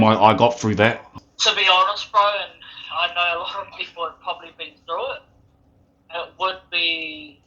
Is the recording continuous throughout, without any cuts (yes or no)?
no